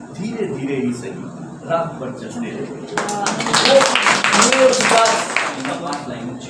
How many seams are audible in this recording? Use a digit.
1